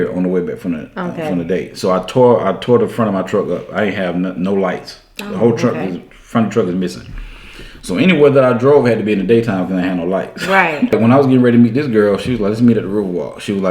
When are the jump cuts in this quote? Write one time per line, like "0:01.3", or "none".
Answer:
0:10.9